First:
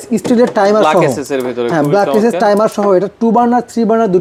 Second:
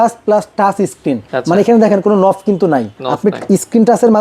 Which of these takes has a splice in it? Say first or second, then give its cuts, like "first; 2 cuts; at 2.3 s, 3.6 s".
second; 2 cuts; at 1.3 s, 3.0 s